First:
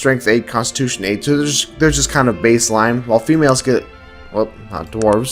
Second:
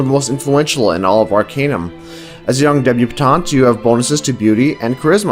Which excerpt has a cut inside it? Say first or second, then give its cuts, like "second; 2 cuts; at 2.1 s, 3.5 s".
first; 1 cut; at 1.2 s